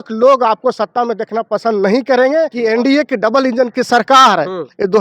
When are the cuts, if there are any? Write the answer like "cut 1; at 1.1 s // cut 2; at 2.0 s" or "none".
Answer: cut 1; at 2.5 s